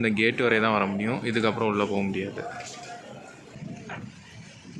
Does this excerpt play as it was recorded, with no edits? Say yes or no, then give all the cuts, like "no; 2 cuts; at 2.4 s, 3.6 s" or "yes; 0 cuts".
no; 1 cut; at 3.5 s